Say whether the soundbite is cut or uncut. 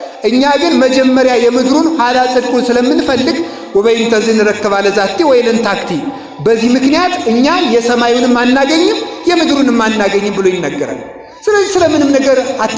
uncut